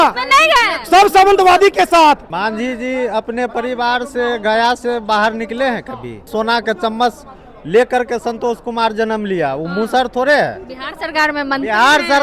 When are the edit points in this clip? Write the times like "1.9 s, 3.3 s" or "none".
2.3 s, 6.3 s